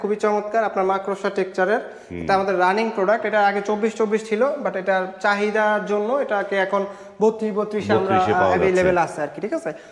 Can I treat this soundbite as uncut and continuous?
yes; 0 cuts

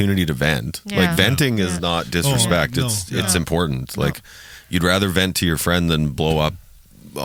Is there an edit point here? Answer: no; 0 cuts

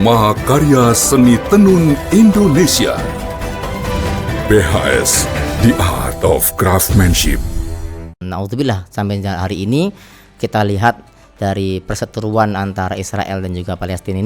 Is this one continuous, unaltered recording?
no; 1 cut; at 8.2 s

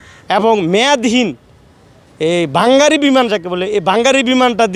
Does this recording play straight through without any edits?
yes; 0 cuts

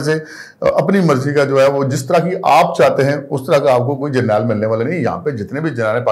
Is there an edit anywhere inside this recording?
no; 0 cuts

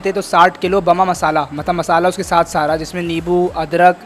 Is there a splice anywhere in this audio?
no; 0 cuts

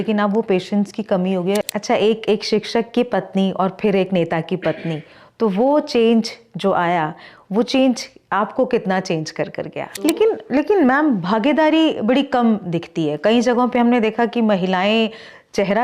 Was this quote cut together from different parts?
yes; 2 cuts; at 1.6 s, 9.8 s

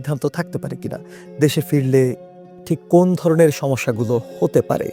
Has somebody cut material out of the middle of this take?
no; 0 cuts

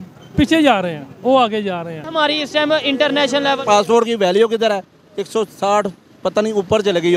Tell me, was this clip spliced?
yes; 1 cut; at 2.0 s

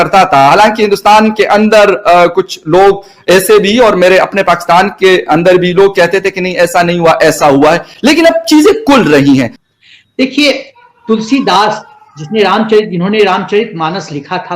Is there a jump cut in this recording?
yes; 1 cut; at 9.6 s

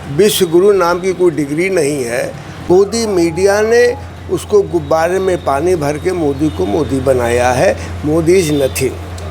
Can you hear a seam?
yes; 1 cut; at 2.5 s

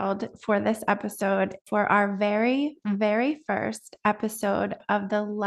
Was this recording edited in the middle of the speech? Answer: yes; 1 cut; at 1.6 s

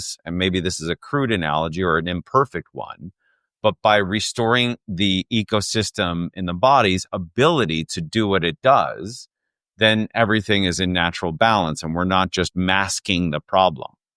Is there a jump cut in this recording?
no; 0 cuts

